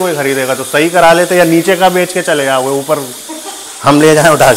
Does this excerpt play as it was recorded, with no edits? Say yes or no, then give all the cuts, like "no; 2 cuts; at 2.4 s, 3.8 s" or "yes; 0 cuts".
yes; 0 cuts